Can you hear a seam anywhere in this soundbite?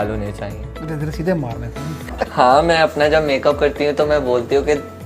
yes; 1 cut; at 2.1 s

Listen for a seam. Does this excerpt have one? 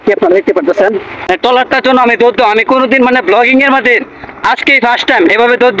no; 0 cuts

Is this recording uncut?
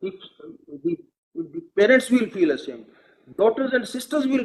yes; 0 cuts

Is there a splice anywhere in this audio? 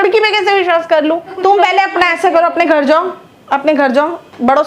yes; 1 cut; at 1.3 s

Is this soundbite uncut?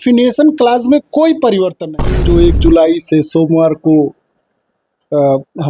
no; 1 cut; at 2.2 s

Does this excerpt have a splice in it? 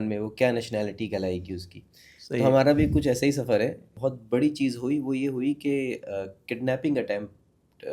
yes; 1 cut; at 3.9 s

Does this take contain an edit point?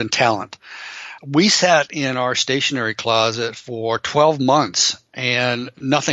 yes; 1 cut; at 1.1 s

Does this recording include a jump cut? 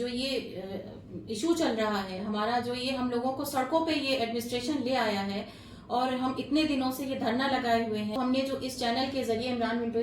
yes; 1 cut; at 8.2 s

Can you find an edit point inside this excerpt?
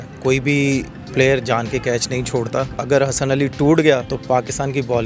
yes; 2 cuts; at 2.7 s, 4.1 s

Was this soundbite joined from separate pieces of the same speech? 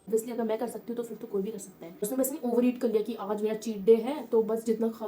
yes; 1 cut; at 2.0 s

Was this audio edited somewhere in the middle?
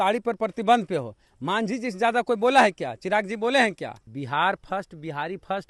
yes; 1 cut; at 4.0 s

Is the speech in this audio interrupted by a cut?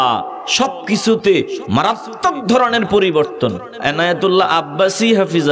yes; 1 cut; at 3.7 s

